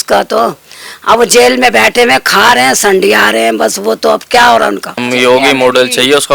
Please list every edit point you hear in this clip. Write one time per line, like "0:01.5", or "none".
0:05.0